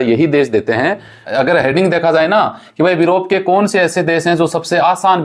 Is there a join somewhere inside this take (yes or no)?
yes